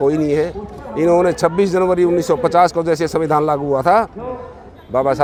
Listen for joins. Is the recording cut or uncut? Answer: uncut